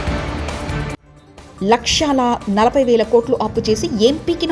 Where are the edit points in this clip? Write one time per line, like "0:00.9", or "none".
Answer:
0:00.9